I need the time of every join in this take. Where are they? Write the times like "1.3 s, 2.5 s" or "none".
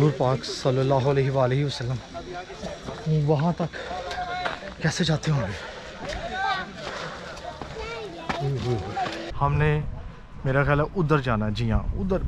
9.3 s